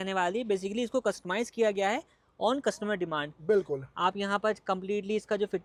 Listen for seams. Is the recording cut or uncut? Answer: uncut